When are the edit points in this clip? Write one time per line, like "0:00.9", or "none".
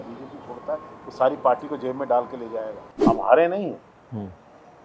0:02.8